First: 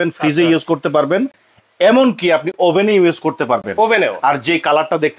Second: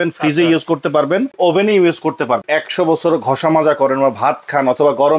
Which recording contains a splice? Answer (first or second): second